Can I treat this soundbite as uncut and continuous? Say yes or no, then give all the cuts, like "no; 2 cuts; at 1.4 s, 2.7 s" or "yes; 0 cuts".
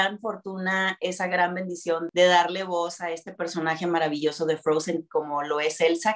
yes; 0 cuts